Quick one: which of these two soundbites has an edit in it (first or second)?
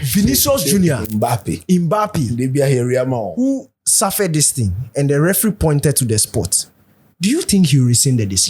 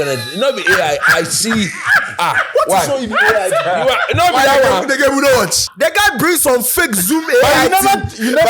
second